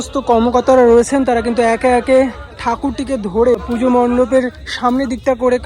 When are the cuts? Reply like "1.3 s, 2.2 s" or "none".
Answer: 3.6 s